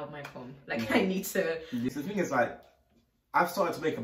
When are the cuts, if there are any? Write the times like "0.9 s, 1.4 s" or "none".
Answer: 1.9 s